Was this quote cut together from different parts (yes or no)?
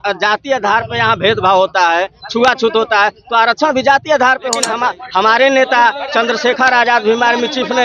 yes